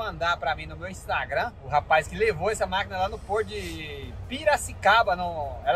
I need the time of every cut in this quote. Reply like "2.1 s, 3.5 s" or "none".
1.6 s